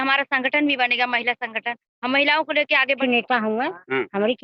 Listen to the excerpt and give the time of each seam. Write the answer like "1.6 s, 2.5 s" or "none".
3.0 s